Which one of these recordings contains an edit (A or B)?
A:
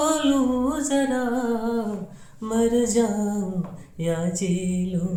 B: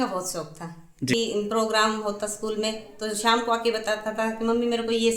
B